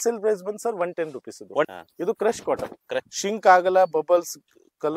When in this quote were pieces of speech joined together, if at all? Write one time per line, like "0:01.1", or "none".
0:01.7
0:03.1